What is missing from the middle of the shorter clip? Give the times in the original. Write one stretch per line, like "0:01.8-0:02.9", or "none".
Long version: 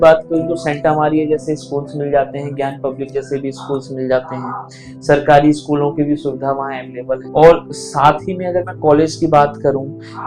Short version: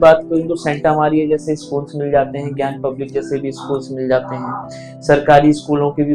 none